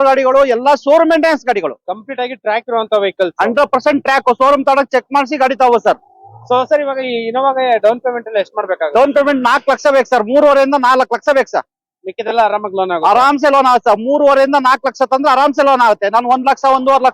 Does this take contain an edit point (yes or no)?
no